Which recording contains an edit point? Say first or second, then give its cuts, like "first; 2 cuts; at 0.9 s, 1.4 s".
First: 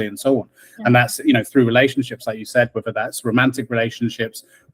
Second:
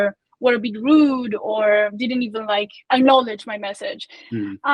second; 1 cut; at 2.8 s